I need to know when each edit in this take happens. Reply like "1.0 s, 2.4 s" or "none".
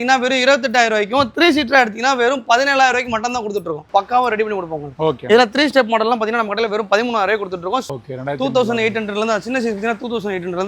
3.8 s, 7.9 s